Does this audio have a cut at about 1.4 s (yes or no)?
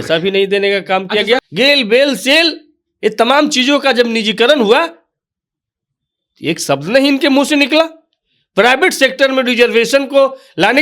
yes